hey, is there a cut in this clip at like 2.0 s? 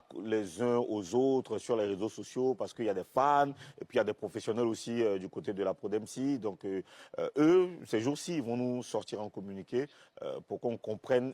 no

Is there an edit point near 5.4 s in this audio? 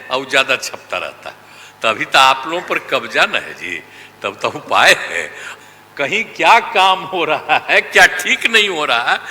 yes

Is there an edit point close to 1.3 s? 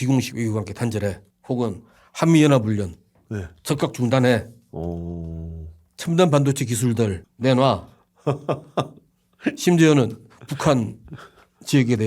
yes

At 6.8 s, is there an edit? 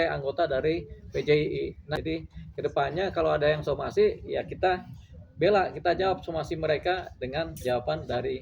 no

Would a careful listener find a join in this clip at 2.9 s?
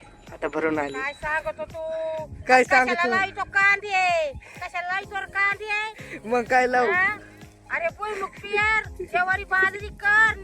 no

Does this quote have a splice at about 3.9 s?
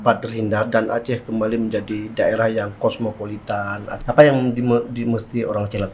yes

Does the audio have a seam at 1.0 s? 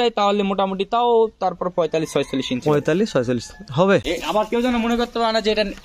no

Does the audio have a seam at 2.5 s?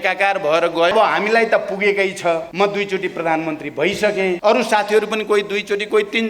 yes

